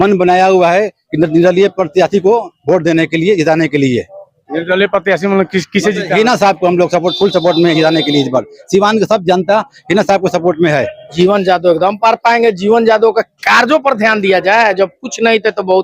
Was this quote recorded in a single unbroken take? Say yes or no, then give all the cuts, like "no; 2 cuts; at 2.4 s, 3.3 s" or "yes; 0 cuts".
no; 1 cut; at 11.1 s